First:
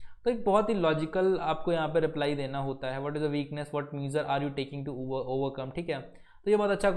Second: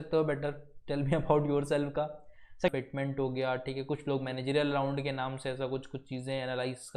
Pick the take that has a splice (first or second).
second